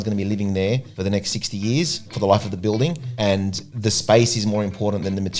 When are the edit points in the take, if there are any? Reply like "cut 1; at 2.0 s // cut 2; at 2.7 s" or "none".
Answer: cut 1; at 0.9 s // cut 2; at 2.0 s // cut 3; at 3.4 s